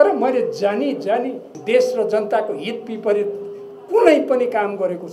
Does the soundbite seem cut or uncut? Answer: cut